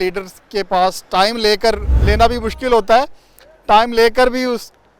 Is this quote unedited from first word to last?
no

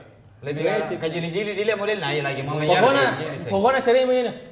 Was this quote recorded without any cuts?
yes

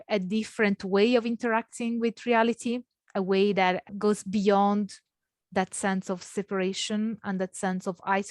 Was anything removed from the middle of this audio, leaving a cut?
yes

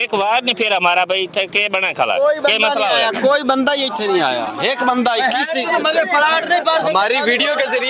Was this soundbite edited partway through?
no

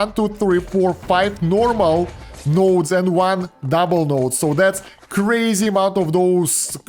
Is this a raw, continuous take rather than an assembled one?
yes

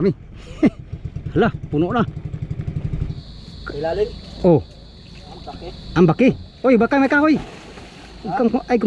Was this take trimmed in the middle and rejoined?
yes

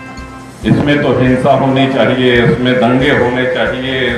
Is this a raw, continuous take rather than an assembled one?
yes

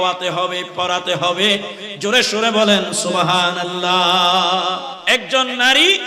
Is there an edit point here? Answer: yes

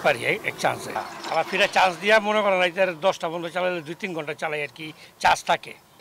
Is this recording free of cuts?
yes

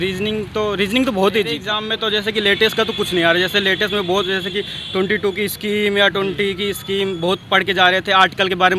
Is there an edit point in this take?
yes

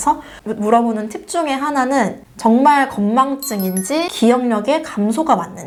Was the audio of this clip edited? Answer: no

